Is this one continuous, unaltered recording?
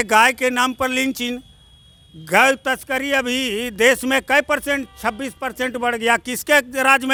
yes; 0 cuts

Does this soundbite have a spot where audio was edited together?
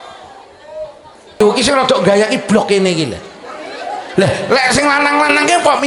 yes; 1 cut; at 1.4 s

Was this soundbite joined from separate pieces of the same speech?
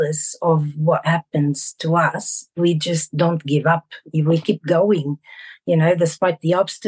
no; 0 cuts

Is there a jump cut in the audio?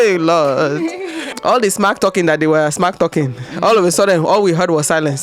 no; 0 cuts

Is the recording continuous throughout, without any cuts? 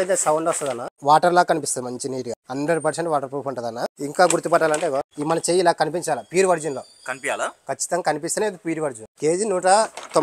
no; 5 cuts; at 1.0 s, 2.4 s, 3.9 s, 5.1 s, 9.1 s

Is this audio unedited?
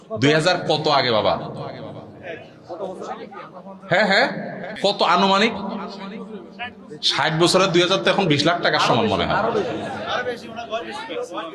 no; 1 cut; at 4.7 s

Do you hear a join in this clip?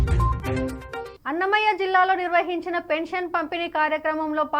yes; 1 cut; at 1.1 s

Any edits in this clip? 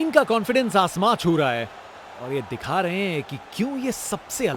no; 0 cuts

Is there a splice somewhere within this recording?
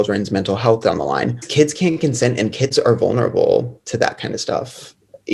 yes; 1 cut; at 1.4 s

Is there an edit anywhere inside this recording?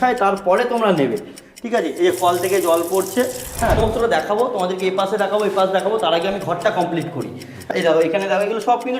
yes; 2 cuts; at 3.8 s, 7.7 s

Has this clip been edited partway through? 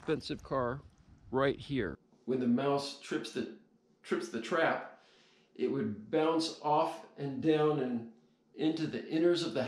yes; 1 cut; at 2.1 s

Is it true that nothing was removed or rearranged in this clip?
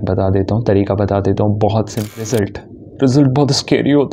no; 1 cut; at 2.2 s

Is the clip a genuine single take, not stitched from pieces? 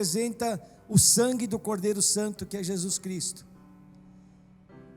yes; 0 cuts

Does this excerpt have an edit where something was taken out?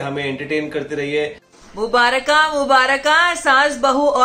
yes; 1 cut; at 1.5 s

